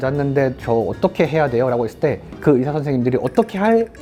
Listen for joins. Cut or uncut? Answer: uncut